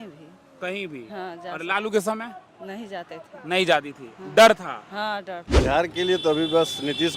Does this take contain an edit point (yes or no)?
yes